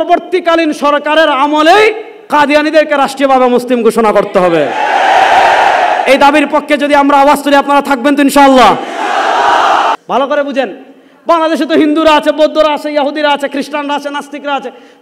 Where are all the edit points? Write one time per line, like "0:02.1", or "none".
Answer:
0:10.0